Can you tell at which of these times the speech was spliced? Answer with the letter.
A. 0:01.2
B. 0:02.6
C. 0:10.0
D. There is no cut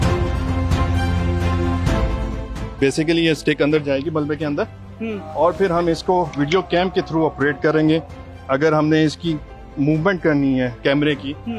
B